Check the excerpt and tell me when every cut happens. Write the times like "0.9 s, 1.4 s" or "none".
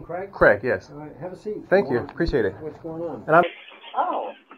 3.4 s